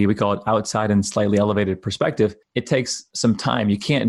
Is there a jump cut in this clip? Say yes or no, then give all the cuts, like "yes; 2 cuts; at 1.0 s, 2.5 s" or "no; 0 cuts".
yes; 1 cut; at 2.7 s